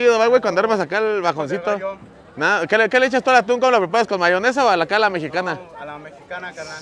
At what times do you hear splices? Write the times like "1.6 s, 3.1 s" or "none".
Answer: none